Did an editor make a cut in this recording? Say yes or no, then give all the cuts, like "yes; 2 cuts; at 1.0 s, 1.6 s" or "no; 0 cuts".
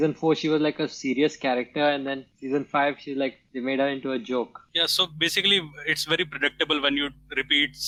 no; 0 cuts